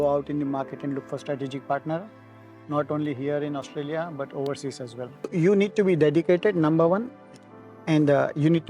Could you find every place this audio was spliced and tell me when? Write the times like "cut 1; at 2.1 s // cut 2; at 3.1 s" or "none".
cut 1; at 5.3 s